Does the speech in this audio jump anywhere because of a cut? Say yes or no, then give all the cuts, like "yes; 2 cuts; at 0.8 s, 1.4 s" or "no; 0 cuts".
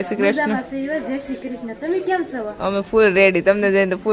no; 0 cuts